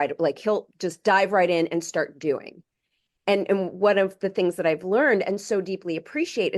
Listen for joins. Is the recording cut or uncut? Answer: uncut